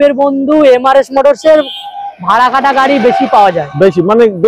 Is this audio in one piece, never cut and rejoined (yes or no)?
yes